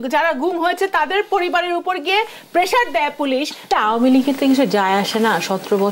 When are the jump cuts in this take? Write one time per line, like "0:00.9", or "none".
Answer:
0:03.6